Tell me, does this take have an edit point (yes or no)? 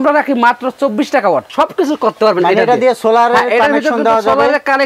yes